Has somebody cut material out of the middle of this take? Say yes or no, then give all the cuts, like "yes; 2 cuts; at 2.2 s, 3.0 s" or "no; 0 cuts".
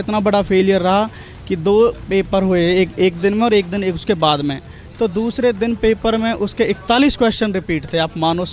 no; 0 cuts